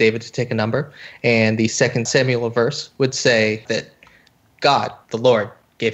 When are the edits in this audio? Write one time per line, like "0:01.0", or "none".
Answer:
0:02.1
0:03.6
0:05.0